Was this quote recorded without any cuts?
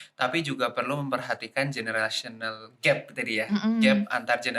yes; 0 cuts

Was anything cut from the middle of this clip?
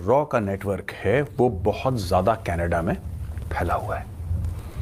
no; 0 cuts

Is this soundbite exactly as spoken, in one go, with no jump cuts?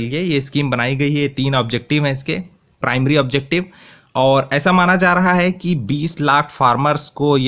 yes; 0 cuts

